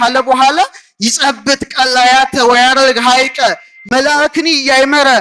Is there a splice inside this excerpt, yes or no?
yes